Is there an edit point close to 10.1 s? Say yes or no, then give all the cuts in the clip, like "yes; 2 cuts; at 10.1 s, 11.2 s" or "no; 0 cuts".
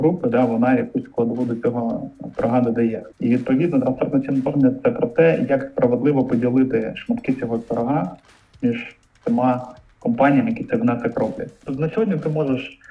no; 2 cuts; at 3.1 s, 11.5 s